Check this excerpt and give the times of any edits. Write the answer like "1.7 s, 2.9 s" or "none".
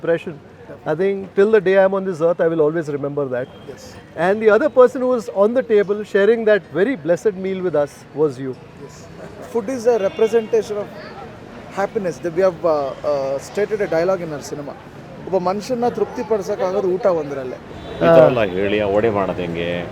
9.2 s, 17.6 s